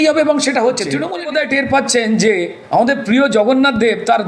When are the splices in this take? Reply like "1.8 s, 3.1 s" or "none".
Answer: 1.0 s